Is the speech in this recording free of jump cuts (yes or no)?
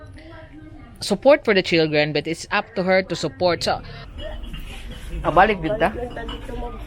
no